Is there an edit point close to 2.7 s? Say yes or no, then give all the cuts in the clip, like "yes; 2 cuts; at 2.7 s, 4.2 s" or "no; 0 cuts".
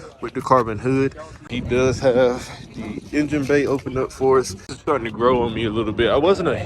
no; 2 cuts; at 1.4 s, 4.8 s